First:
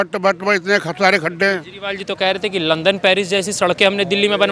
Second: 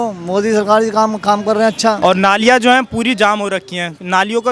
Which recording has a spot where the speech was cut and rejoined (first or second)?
second